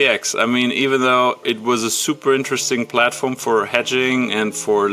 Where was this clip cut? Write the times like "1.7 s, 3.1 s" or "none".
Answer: 1.4 s

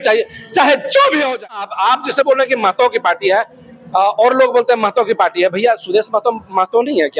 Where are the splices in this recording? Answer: 1.6 s

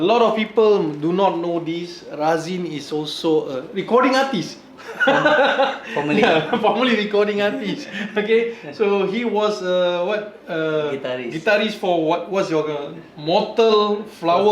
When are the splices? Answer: none

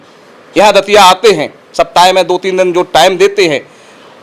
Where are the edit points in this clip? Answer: none

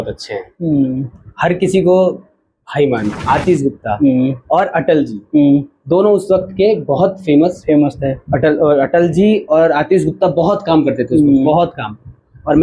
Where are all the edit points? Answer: 3.2 s

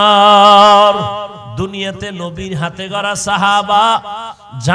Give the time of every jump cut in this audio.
1.4 s

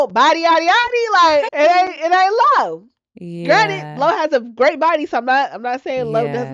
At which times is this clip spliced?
1.5 s

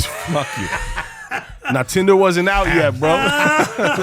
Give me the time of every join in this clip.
none

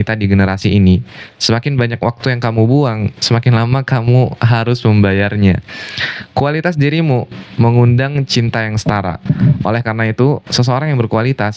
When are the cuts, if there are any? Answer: none

